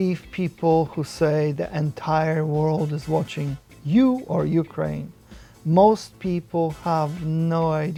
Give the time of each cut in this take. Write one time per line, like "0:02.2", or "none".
none